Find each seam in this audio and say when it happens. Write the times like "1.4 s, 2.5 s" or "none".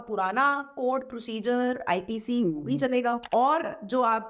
3.2 s